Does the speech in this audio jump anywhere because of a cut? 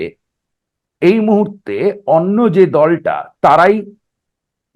no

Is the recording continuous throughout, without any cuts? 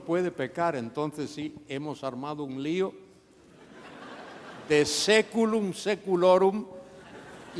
yes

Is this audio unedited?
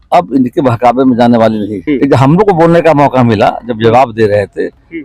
no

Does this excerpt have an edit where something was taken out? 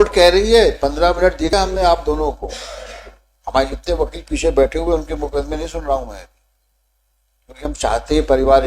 yes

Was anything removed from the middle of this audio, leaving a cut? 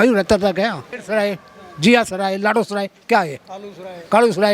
yes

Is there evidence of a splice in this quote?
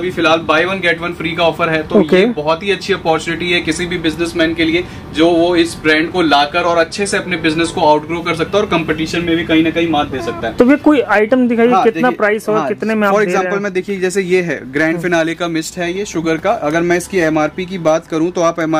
no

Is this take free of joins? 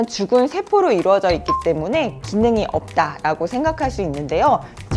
yes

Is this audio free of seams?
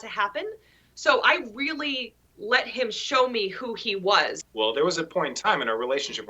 no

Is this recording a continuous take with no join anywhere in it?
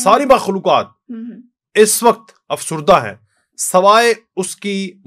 yes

